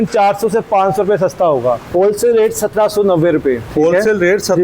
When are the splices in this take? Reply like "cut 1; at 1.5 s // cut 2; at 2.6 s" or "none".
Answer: cut 1; at 1.8 s // cut 2; at 3.6 s